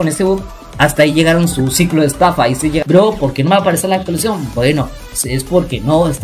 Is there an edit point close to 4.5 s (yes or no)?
no